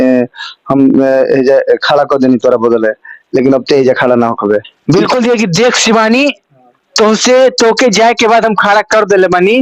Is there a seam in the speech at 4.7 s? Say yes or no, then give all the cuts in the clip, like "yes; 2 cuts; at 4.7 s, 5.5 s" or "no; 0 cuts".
yes; 1 cut; at 4.7 s